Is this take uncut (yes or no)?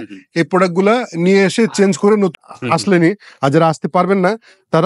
no